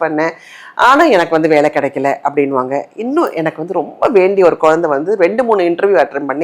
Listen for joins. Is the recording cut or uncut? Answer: uncut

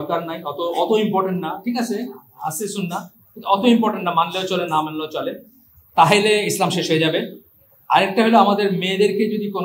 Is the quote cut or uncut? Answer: uncut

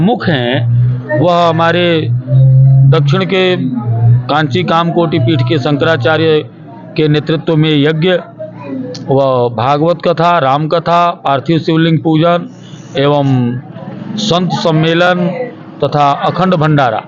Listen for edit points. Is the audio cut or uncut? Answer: uncut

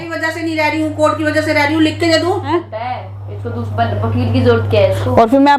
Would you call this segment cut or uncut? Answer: cut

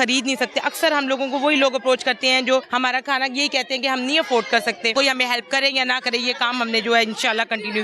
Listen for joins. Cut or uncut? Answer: cut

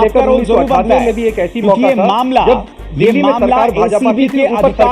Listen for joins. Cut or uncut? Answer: uncut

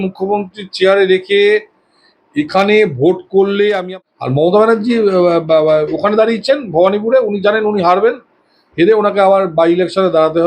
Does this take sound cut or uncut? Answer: cut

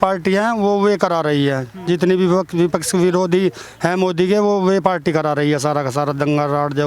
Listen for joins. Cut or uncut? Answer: uncut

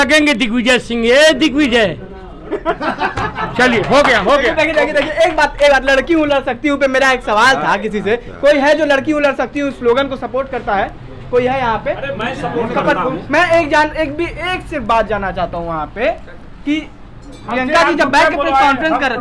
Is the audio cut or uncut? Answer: uncut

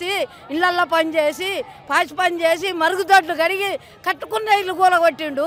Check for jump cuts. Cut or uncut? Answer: uncut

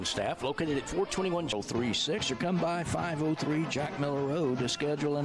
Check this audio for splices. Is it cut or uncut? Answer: cut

